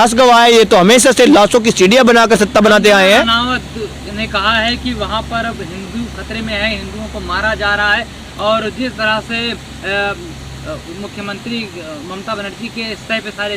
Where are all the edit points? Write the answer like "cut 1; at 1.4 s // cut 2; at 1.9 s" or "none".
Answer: none

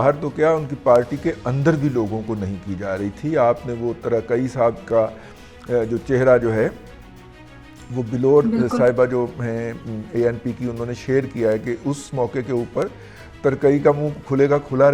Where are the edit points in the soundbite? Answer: none

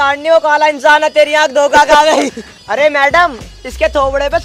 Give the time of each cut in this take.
cut 1; at 2.6 s

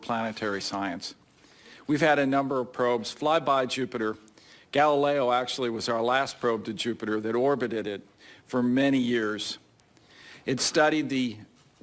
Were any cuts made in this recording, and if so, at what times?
none

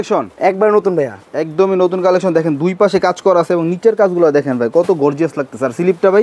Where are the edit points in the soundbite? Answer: none

